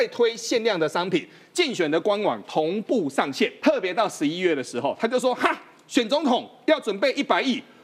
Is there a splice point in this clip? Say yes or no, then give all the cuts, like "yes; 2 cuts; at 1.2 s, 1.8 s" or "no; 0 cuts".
yes; 1 cut; at 3.6 s